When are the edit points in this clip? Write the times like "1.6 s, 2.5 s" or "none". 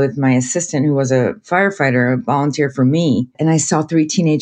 3.4 s